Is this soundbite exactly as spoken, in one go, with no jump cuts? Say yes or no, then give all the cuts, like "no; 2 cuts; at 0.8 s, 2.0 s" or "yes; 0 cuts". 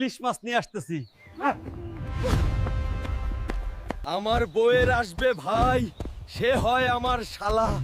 no; 1 cut; at 4.1 s